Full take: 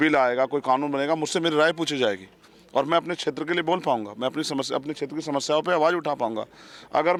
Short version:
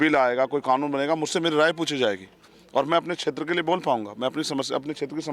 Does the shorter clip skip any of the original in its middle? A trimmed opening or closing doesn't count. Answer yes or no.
no